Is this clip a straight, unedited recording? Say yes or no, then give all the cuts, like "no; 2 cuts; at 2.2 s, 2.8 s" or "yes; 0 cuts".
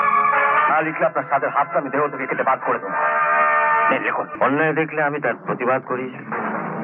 no; 1 cut; at 4.3 s